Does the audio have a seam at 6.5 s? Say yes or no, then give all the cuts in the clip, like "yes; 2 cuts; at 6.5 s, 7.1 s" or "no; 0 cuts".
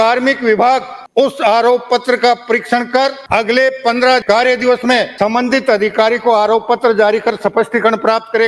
no; 4 cuts; at 1.0 s, 3.2 s, 4.2 s, 5.1 s